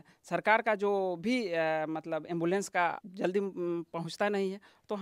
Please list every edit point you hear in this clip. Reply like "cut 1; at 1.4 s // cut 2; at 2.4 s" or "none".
cut 1; at 3.1 s